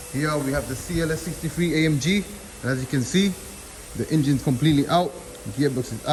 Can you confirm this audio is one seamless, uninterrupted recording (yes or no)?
yes